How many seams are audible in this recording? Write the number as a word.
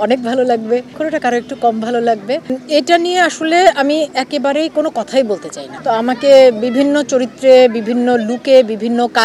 three